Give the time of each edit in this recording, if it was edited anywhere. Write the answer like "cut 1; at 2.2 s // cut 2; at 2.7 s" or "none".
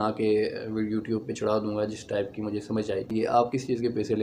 cut 1; at 3.1 s